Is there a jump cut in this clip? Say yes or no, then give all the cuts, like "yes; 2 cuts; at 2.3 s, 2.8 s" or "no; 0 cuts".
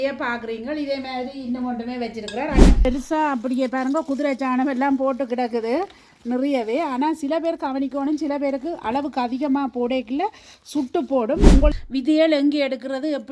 yes; 2 cuts; at 2.9 s, 11.7 s